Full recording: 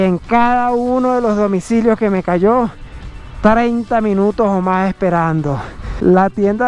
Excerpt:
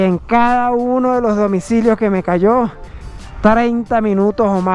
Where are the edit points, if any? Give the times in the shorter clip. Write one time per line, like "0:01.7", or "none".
none